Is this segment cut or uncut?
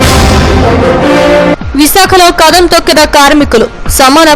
cut